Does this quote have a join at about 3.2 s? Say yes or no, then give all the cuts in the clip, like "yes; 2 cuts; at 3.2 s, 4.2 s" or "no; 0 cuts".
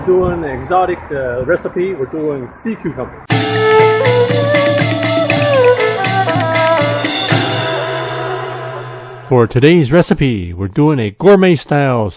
yes; 1 cut; at 3.2 s